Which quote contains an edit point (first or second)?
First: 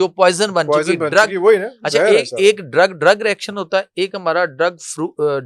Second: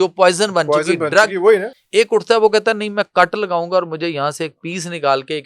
second